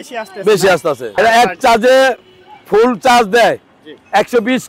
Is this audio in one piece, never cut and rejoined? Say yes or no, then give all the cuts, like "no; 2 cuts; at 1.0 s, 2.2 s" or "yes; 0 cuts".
no; 1 cut; at 1.2 s